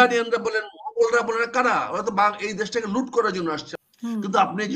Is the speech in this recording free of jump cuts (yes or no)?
no